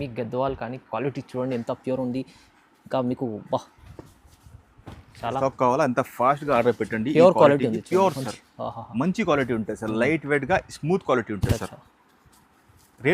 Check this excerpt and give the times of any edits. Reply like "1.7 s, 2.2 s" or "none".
5.4 s